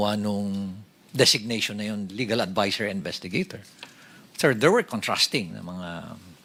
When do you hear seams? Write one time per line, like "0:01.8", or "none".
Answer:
none